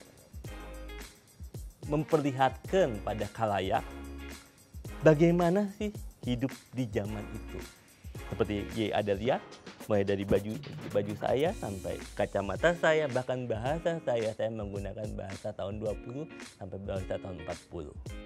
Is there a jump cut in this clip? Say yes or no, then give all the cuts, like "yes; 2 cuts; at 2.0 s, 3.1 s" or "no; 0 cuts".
no; 0 cuts